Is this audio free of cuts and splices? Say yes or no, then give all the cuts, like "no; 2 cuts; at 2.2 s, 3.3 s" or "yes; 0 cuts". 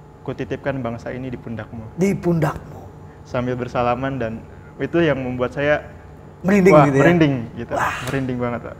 yes; 0 cuts